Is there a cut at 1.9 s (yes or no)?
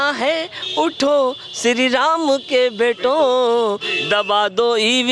no